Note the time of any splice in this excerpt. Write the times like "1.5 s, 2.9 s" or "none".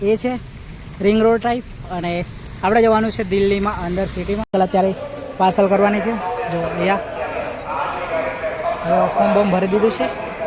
4.5 s